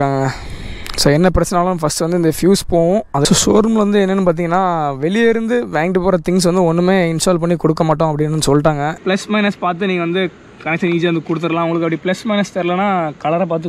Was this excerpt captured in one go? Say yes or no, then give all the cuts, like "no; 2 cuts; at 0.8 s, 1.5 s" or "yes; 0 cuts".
no; 2 cuts; at 3.2 s, 9.0 s